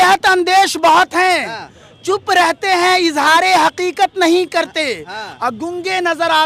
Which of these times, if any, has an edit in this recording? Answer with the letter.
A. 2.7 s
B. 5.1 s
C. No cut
C